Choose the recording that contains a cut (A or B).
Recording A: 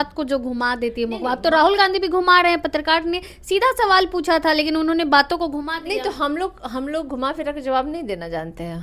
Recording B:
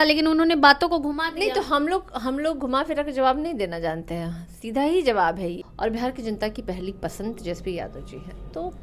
B